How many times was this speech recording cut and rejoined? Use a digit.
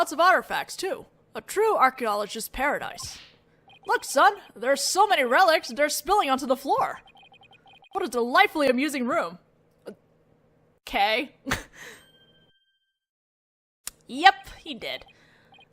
1